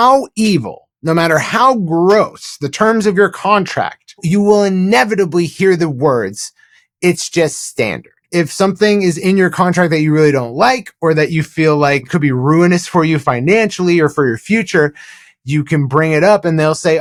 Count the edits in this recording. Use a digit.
0